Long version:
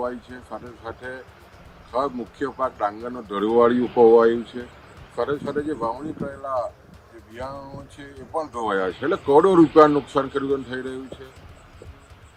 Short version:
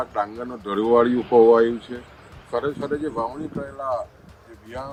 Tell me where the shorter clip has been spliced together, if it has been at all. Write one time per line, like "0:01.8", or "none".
none